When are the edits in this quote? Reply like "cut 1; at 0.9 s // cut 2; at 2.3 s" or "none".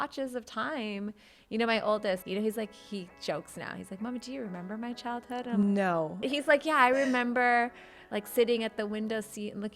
cut 1; at 2.2 s // cut 2; at 6.3 s